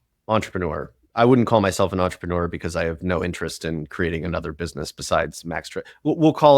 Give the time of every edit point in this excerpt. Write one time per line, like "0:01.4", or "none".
0:01.0